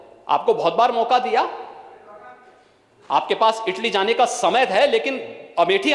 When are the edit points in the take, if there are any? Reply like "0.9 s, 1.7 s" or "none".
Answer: none